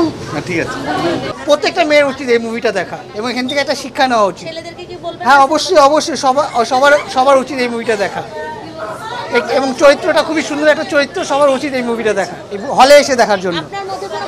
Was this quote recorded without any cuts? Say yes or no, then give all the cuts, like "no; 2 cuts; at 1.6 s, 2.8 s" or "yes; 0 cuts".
yes; 0 cuts